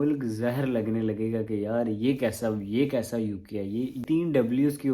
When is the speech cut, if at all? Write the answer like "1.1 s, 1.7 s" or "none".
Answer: 4.0 s